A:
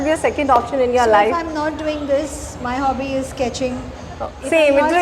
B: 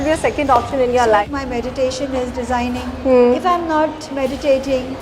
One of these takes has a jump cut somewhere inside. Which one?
B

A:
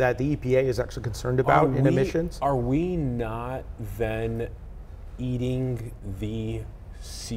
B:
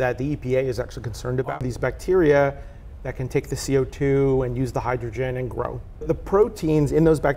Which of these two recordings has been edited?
B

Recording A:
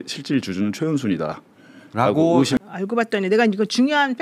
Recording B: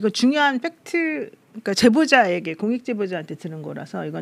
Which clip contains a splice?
A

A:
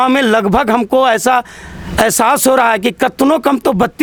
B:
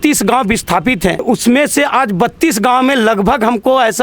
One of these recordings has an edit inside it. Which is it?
B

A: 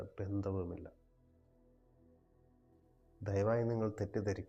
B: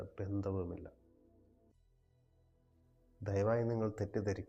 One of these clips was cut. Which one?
B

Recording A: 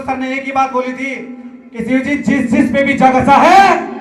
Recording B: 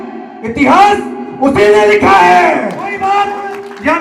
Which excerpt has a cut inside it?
B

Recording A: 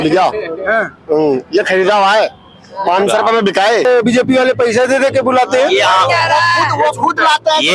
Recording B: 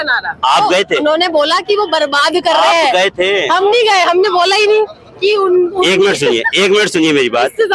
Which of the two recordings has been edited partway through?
A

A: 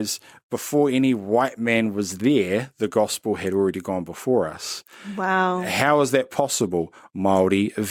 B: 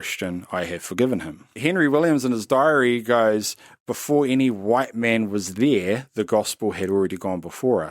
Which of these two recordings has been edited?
B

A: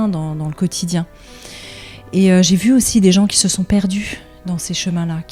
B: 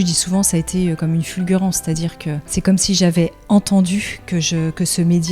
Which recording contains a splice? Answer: B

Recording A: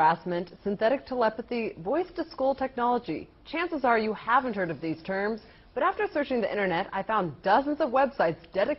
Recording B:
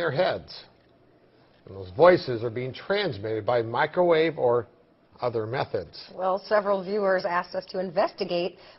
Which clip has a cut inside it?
A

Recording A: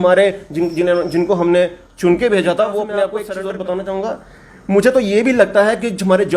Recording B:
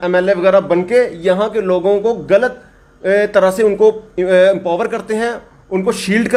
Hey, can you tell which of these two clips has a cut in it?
A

